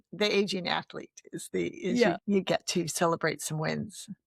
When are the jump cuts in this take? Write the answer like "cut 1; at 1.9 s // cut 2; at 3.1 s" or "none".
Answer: cut 1; at 2.2 s